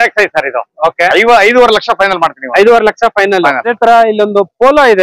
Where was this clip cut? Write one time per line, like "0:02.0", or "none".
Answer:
0:03.7